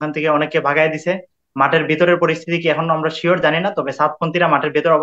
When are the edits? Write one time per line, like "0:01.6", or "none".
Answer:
none